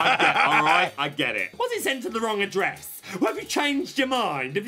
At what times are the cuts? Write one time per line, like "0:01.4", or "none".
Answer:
0:01.5